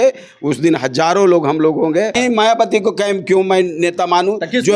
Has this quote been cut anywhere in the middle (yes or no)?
yes